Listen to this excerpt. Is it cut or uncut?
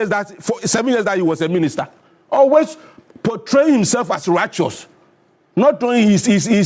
uncut